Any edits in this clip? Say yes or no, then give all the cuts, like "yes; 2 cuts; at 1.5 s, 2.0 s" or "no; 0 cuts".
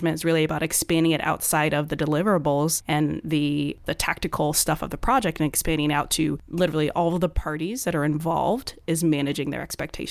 yes; 3 cuts; at 2.8 s, 3.8 s, 6.4 s